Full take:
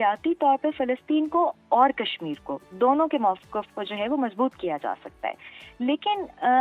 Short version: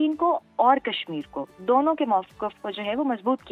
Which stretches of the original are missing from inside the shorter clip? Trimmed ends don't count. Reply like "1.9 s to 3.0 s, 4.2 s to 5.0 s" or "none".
none